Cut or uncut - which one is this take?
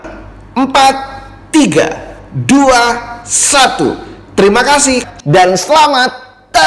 uncut